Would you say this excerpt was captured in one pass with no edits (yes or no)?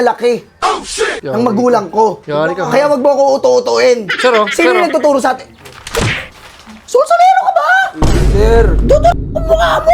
yes